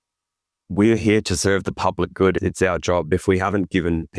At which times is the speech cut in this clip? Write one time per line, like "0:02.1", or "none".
0:03.1